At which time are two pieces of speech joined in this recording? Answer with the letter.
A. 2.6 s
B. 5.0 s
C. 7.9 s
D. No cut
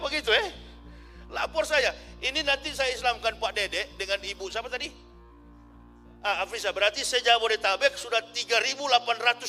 D